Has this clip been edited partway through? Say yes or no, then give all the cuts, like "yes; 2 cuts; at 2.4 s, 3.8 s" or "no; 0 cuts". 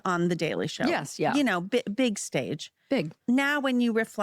yes; 1 cut; at 3.1 s